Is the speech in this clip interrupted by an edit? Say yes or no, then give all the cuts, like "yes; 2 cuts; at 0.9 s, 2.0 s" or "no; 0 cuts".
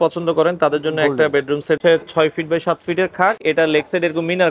yes; 2 cuts; at 1.8 s, 3.4 s